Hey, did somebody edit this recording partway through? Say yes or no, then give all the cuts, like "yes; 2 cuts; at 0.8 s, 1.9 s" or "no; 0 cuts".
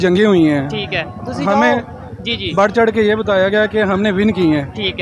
no; 0 cuts